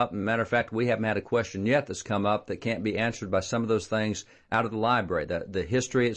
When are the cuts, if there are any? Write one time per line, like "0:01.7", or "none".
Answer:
0:02.0